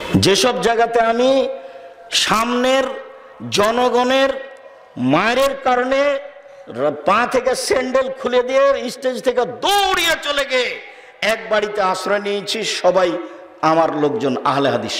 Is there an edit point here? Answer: no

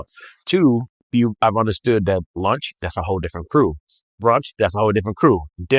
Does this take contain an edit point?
yes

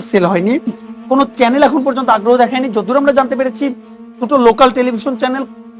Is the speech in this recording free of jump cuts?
yes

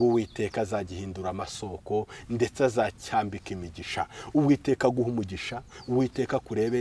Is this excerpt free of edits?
yes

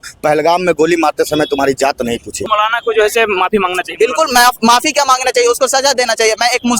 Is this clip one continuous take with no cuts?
no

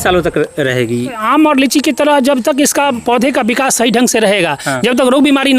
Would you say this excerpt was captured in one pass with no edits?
no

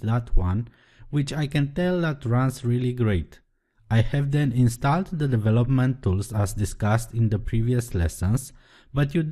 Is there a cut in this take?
no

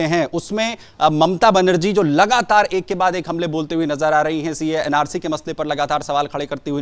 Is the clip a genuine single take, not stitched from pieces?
yes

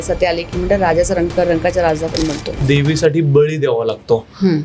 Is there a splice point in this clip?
yes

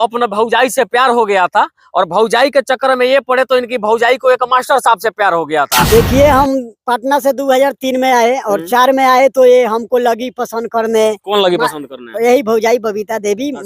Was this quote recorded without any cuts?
no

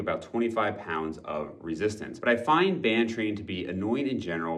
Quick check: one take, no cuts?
yes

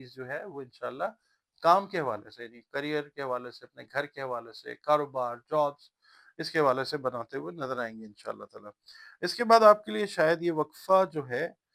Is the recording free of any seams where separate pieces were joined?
yes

